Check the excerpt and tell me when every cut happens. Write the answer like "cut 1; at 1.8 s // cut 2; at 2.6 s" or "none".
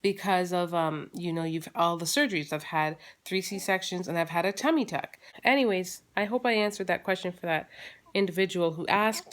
cut 1; at 4.7 s